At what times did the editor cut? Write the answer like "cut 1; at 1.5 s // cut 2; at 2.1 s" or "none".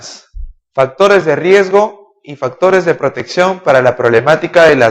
cut 1; at 3.9 s